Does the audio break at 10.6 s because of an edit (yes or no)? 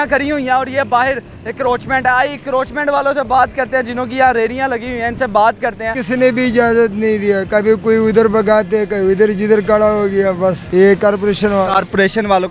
yes